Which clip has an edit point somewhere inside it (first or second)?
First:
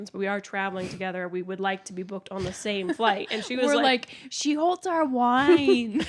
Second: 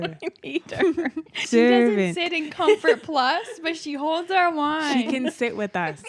second